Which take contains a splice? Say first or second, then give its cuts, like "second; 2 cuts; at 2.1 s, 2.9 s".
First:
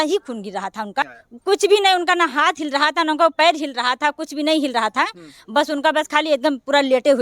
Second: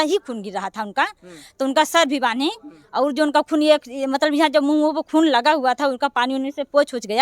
first; 1 cut; at 1.2 s